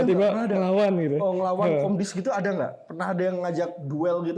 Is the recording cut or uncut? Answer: uncut